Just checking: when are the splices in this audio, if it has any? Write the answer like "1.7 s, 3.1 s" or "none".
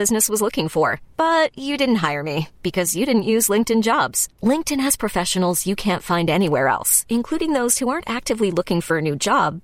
none